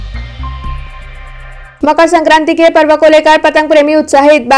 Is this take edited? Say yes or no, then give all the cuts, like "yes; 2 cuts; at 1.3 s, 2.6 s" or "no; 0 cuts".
yes; 1 cut; at 1.6 s